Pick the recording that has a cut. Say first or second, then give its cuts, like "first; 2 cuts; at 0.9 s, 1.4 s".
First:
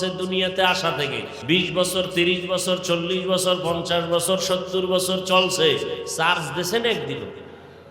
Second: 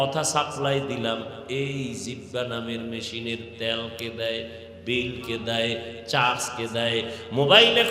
first; 1 cut; at 1.3 s